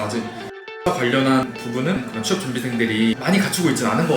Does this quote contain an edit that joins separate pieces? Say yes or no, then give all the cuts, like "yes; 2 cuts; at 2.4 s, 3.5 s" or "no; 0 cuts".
yes; 2 cuts; at 1.5 s, 3.2 s